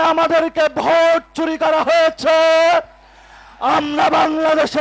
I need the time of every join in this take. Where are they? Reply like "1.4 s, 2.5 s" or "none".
none